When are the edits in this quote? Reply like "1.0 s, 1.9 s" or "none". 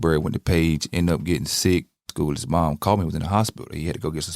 2.1 s